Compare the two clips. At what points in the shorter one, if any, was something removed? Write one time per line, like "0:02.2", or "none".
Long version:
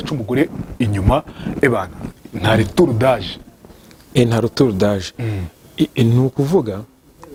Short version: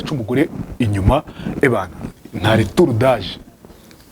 none